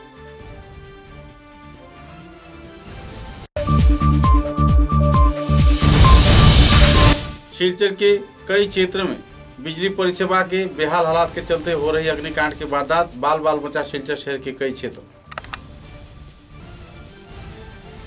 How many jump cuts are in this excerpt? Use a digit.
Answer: 2